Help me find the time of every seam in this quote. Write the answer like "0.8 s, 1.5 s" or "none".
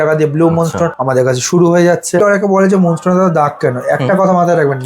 1.0 s, 2.2 s